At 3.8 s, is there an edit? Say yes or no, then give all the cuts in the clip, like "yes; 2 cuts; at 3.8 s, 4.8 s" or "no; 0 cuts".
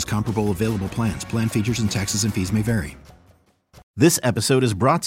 yes; 1 cut; at 3.8 s